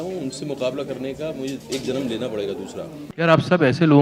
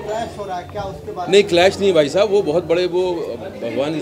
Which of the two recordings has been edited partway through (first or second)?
first